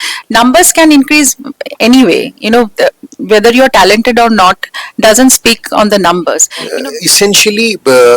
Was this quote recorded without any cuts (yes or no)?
no